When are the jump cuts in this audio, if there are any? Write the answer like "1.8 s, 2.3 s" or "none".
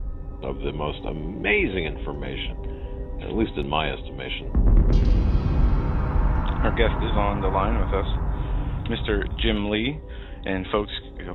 none